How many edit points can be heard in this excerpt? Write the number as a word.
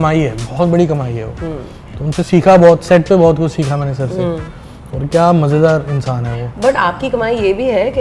zero